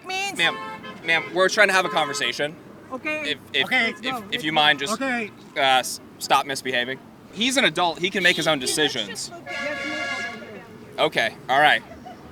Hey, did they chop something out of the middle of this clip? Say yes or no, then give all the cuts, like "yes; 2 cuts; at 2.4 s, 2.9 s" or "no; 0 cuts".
no; 0 cuts